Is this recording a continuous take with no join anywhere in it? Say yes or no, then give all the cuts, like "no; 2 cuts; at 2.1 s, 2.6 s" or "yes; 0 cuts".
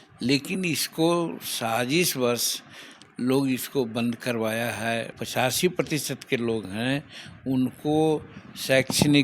no; 1 cut; at 5.2 s